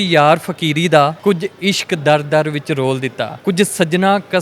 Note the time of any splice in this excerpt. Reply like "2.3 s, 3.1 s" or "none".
1.2 s, 3.3 s